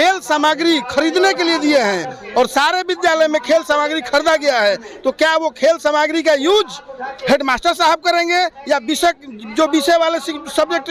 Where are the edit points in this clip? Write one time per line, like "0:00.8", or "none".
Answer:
none